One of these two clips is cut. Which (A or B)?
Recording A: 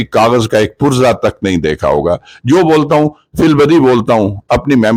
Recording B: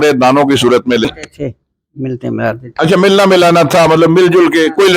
B